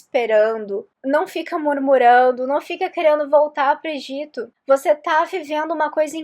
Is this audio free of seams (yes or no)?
yes